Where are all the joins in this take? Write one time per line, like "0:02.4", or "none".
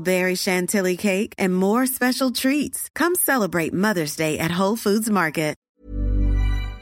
0:05.7